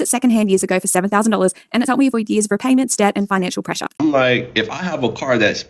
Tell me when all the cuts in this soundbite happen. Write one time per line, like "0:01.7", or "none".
0:03.8